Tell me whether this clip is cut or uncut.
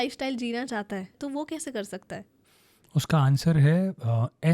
cut